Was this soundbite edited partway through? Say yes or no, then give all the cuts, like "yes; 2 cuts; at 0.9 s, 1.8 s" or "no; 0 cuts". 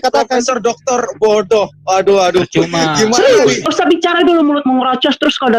yes; 1 cut; at 3.6 s